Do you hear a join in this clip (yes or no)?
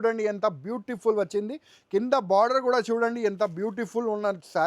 no